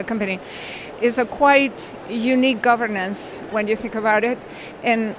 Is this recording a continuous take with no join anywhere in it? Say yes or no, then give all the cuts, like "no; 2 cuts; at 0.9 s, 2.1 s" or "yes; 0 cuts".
no; 2 cuts; at 0.9 s, 3.5 s